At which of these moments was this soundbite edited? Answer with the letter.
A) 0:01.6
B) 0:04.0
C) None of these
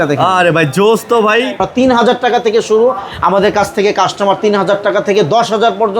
A